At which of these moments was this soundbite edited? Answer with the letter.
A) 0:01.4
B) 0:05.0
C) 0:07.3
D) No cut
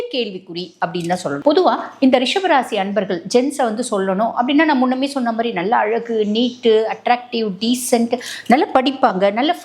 D